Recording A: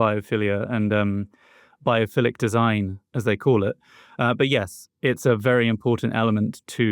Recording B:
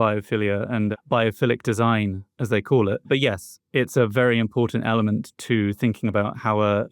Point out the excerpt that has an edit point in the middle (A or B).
B